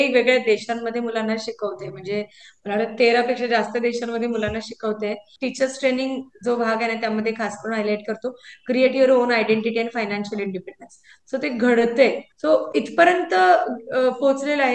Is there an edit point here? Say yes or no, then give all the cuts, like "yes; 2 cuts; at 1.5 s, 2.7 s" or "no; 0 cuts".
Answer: yes; 2 cuts; at 5.4 s, 12.3 s